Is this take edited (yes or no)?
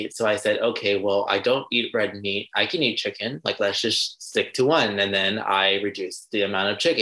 no